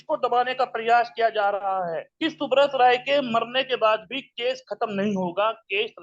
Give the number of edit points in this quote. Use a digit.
1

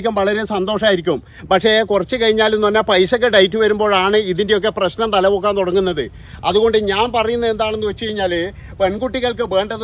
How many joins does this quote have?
0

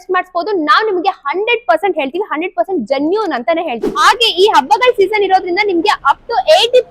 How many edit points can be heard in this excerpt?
1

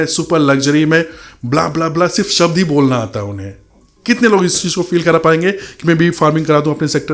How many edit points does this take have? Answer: 0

